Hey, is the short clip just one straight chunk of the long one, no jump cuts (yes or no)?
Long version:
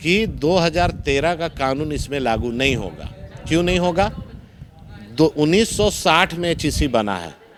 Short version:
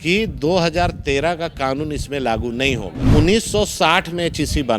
no